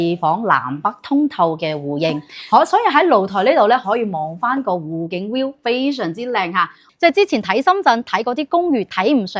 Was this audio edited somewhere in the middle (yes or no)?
yes